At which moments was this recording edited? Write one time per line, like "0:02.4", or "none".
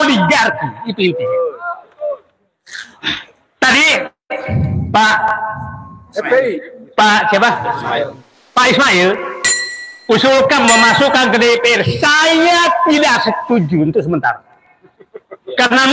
none